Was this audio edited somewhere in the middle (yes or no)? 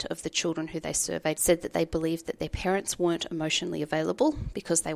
yes